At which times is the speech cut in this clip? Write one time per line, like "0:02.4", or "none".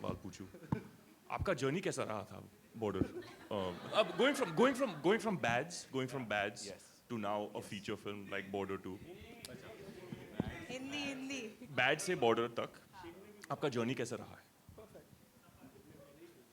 none